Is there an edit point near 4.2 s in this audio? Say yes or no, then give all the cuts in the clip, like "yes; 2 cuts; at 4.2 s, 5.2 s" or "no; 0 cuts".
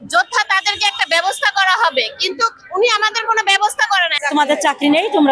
yes; 1 cut; at 4.2 s